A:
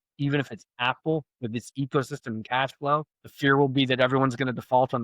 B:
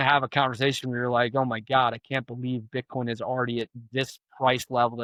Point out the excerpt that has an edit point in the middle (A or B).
A